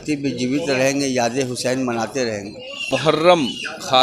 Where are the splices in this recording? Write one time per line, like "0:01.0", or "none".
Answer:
0:02.9